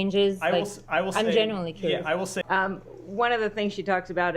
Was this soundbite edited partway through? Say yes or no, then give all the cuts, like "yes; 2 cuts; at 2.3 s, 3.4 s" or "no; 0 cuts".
yes; 1 cut; at 2.4 s